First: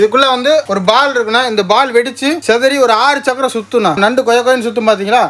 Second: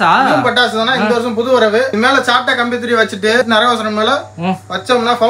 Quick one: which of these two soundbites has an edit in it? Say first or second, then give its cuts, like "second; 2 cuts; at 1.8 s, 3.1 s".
second; 2 cuts; at 1.9 s, 3.4 s